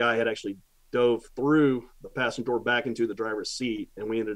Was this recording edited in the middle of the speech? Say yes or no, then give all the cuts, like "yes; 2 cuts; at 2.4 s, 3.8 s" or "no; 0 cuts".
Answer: no; 0 cuts